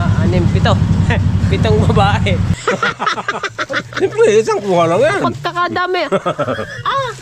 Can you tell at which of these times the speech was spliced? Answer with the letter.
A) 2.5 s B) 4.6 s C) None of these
A